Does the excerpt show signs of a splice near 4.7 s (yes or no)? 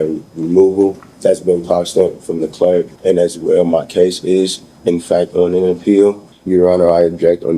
no